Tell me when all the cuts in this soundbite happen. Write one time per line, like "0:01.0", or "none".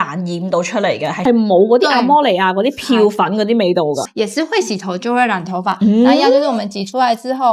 0:01.2
0:04.1